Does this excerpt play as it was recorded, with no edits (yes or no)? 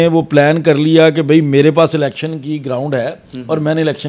yes